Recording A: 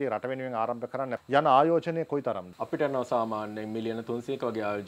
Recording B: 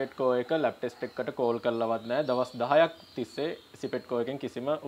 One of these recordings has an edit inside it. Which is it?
A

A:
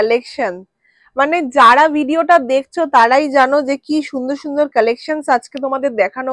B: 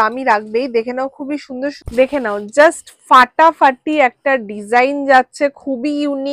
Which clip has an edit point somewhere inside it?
B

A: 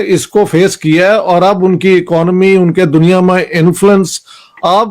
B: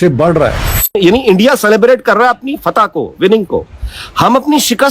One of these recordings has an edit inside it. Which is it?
B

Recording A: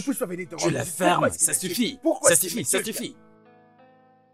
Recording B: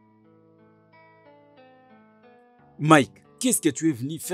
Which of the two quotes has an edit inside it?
B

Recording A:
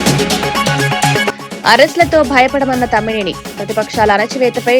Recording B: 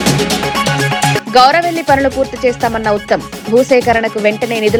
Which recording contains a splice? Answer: A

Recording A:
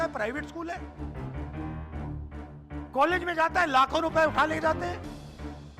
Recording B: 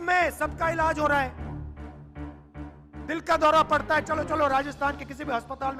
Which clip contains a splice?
A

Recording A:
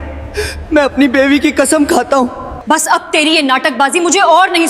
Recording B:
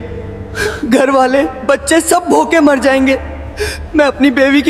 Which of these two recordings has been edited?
A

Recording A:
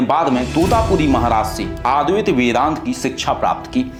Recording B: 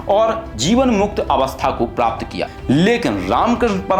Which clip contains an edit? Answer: B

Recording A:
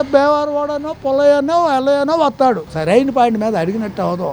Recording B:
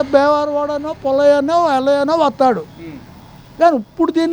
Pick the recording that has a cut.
A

